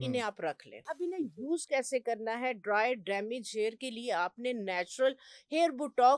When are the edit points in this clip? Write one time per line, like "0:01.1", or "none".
0:00.9